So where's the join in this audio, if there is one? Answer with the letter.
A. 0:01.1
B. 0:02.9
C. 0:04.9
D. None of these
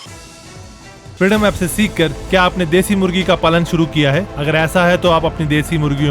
A